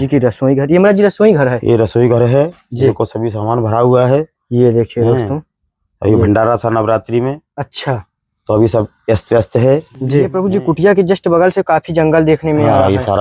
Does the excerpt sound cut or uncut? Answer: cut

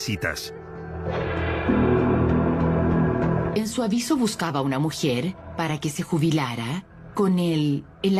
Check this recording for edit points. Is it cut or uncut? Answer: uncut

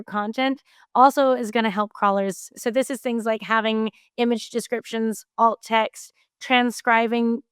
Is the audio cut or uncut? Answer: cut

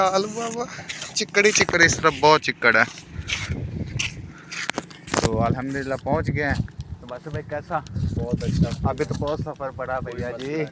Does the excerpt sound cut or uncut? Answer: uncut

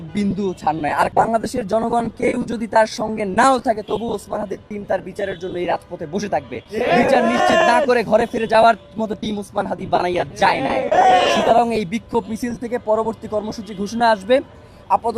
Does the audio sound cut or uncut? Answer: cut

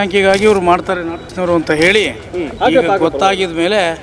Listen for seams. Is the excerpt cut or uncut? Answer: cut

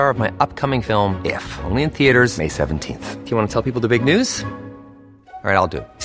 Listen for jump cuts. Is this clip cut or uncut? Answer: uncut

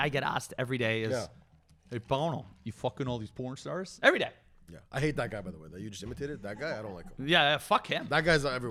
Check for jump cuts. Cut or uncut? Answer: uncut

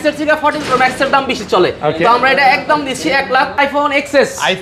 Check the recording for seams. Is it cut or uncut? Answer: cut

